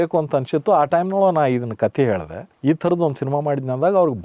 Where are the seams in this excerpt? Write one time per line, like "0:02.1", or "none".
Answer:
none